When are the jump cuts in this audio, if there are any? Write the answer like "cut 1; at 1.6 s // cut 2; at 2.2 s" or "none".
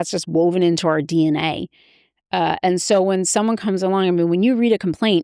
none